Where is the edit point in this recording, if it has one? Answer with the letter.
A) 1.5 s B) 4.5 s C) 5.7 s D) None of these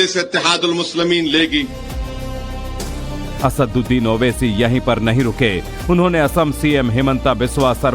C